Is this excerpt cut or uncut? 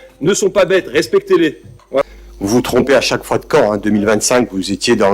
cut